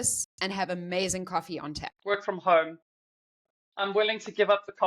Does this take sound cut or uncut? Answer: cut